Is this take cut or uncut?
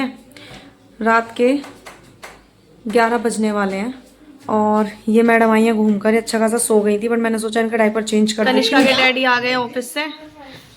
cut